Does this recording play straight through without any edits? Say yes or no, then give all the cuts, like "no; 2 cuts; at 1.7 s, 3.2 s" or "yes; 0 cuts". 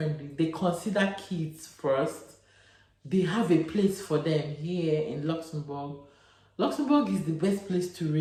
yes; 0 cuts